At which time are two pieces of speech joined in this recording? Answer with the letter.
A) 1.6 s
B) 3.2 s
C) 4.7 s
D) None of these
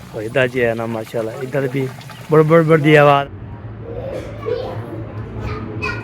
B